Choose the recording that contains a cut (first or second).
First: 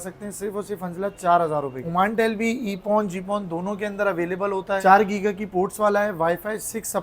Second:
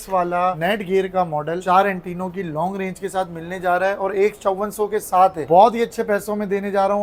first